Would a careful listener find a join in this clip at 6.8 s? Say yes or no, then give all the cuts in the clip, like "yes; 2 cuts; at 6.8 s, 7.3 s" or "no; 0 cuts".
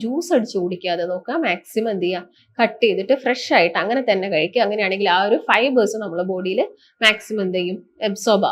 no; 0 cuts